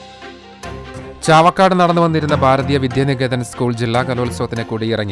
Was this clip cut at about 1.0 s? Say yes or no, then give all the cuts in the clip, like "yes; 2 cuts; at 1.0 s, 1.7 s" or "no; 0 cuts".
yes; 1 cut; at 1.0 s